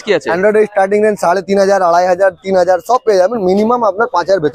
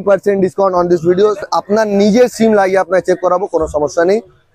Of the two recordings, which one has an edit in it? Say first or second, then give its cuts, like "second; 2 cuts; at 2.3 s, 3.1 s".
second; 1 cut; at 1.5 s